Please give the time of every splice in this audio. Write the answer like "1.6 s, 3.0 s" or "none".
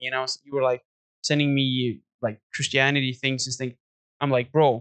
none